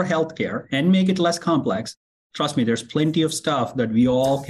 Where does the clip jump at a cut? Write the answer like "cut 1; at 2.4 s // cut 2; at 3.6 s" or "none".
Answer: none